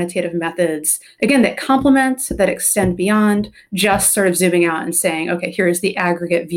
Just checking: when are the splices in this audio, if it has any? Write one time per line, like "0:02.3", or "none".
0:01.1